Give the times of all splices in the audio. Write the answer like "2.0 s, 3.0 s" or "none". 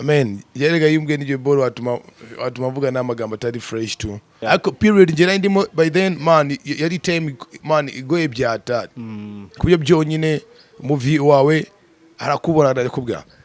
4.4 s